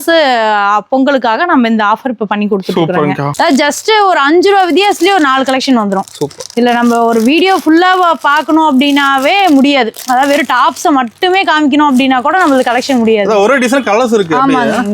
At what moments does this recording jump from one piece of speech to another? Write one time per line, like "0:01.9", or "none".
0:03.3